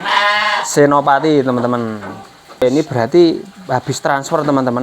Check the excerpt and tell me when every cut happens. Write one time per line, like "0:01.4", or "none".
0:02.8

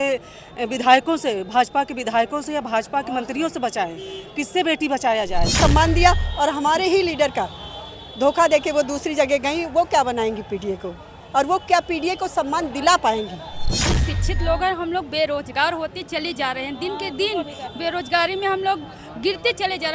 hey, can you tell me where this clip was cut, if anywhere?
0:05.5
0:13.9

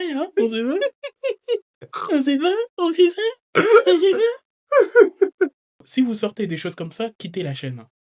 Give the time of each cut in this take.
0:05.8

